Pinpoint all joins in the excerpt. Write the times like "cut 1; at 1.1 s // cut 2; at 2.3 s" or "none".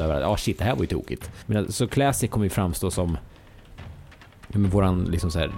cut 1; at 1.3 s